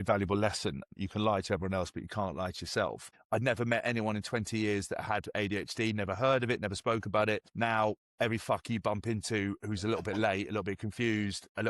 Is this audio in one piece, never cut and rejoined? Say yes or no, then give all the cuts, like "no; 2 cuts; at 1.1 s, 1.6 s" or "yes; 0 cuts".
no; 3 cuts; at 0.9 s, 3.1 s, 7.5 s